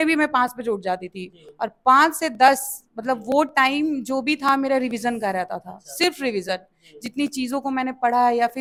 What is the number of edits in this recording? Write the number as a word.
zero